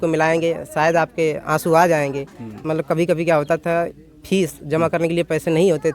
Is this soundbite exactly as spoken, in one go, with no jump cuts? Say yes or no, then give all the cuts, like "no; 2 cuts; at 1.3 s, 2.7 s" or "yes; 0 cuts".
no; 1 cut; at 2.6 s